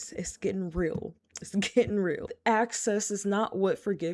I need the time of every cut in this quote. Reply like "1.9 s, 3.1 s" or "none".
2.3 s